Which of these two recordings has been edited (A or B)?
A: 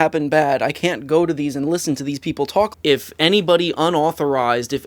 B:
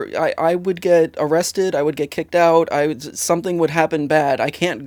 A